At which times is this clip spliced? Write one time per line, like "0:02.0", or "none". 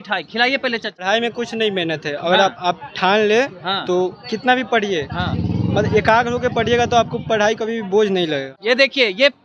0:01.0
0:08.5